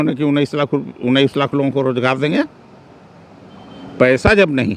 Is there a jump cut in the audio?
no; 0 cuts

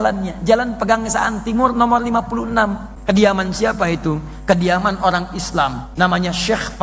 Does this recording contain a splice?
yes; 2 cuts; at 2.9 s, 5.8 s

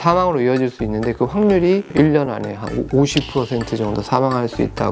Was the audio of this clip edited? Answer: no; 0 cuts

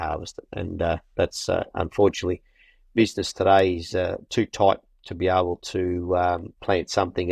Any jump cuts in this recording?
no; 0 cuts

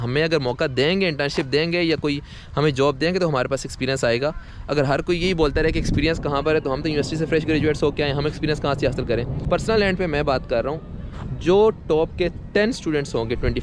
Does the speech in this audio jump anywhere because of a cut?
yes; 1 cut; at 9.4 s

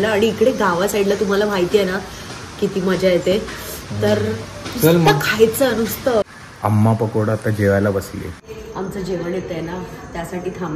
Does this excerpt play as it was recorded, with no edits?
no; 2 cuts; at 6.2 s, 8.5 s

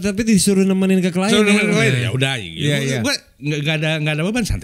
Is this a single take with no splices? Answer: yes; 0 cuts

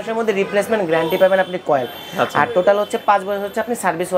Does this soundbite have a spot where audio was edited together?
no; 0 cuts

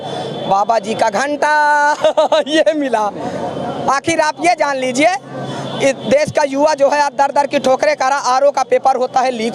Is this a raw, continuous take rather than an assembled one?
yes; 0 cuts

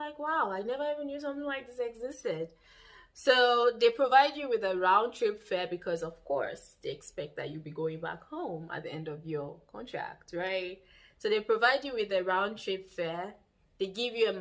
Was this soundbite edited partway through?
no; 0 cuts

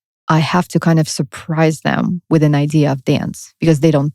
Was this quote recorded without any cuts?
yes; 0 cuts

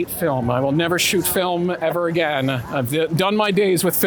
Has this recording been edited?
no; 0 cuts

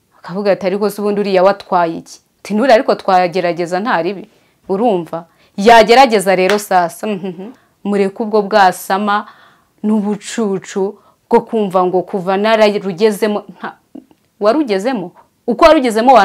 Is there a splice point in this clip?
yes; 1 cut; at 7.5 s

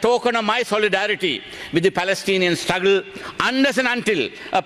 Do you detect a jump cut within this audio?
no; 0 cuts

